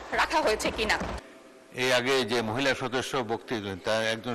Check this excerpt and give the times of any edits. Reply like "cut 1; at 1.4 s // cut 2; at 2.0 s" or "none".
cut 1; at 1.1 s